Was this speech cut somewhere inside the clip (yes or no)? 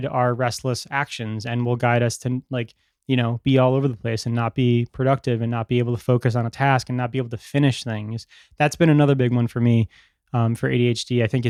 no